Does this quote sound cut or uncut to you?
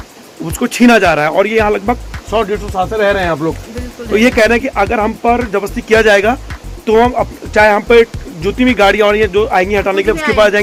uncut